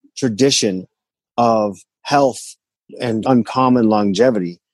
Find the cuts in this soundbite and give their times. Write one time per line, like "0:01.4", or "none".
none